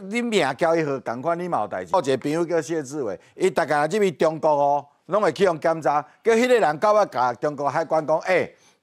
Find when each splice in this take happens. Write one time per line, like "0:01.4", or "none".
0:01.9